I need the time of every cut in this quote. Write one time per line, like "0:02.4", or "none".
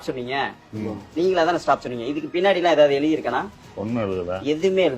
none

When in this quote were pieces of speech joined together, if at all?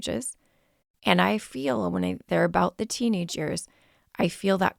none

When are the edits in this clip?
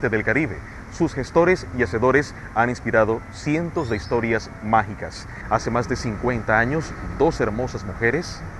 none

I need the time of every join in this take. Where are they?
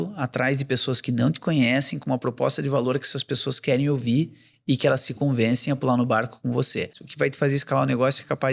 0:07.0

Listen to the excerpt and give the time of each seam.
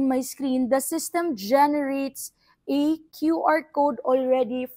none

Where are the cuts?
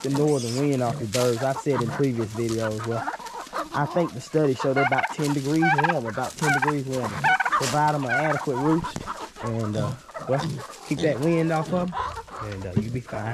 none

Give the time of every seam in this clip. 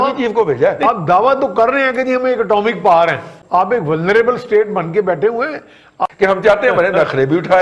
0:00.8
0:03.3
0:06.1

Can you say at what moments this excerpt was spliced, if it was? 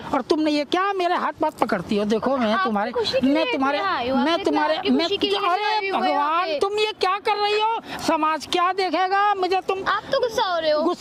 none

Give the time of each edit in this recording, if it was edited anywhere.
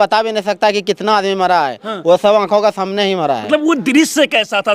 none

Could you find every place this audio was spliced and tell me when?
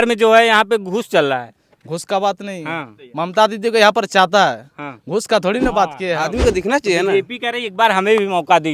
0:06.2

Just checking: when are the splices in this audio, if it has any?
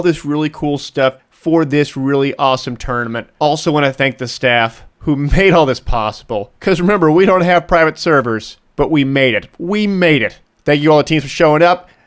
0:07.8

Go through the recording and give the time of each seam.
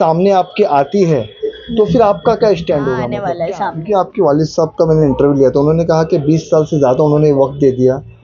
0:03.3

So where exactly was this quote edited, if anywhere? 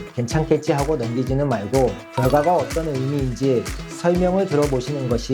0:02.0

